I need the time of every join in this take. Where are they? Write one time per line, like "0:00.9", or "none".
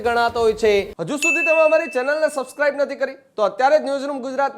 0:01.0